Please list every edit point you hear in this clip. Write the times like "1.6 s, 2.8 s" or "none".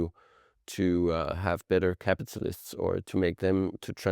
3.0 s